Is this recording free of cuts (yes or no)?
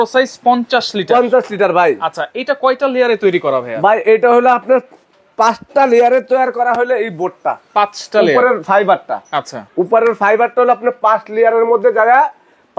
yes